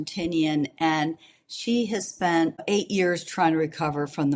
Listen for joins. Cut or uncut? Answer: cut